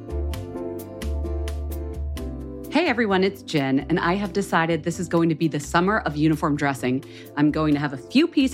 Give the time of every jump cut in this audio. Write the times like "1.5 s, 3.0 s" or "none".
2.2 s

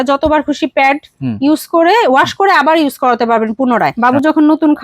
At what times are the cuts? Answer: 3.9 s

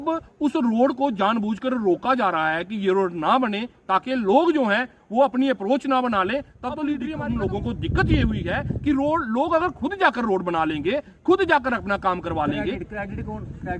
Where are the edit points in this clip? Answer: 7.0 s

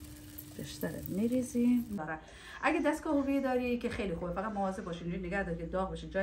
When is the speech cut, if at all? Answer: 2.0 s

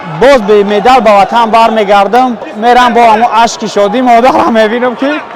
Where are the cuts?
2.5 s

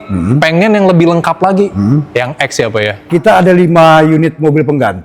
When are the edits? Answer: 3.1 s

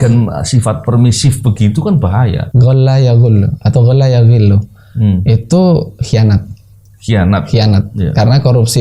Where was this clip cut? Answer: 2.5 s

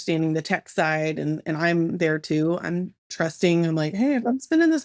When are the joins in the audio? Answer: none

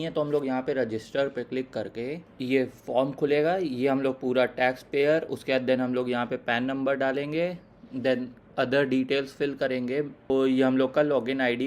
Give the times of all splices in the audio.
2.3 s, 10.3 s

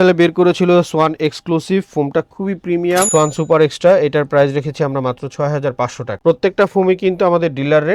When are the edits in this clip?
3.1 s

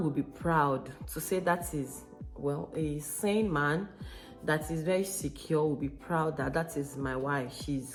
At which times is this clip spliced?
none

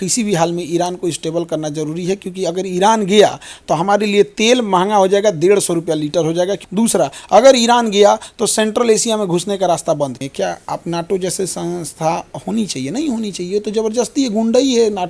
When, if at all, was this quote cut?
6.6 s, 10.2 s

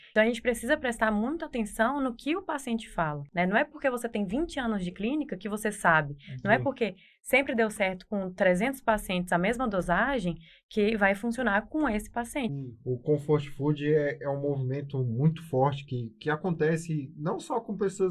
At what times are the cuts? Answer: 3.2 s, 12.5 s

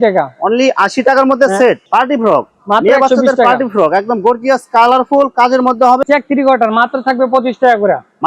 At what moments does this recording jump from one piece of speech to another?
1.8 s, 6.0 s

